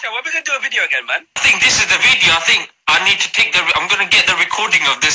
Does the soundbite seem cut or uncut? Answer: cut